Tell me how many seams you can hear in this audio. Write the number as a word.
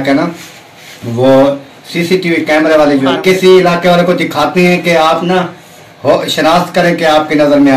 one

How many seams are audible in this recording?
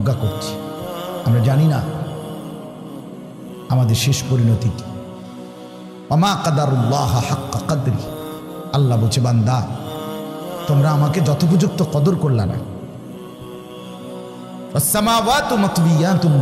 six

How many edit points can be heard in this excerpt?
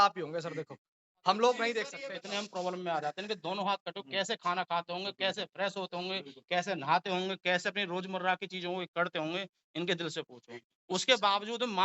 one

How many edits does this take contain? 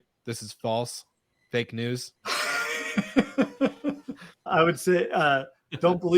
two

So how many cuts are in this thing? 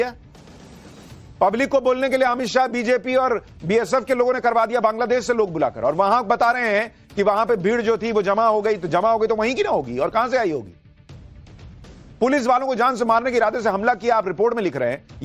one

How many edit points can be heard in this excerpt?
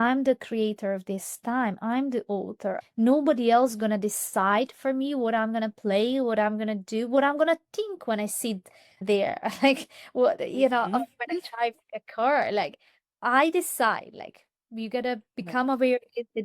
one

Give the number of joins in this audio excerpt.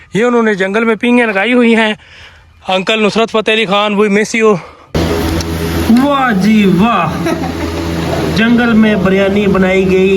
one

